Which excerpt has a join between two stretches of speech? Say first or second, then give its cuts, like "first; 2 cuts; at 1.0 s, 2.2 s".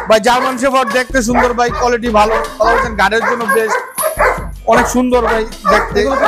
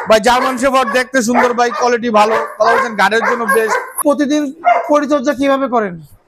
second; 1 cut; at 4.0 s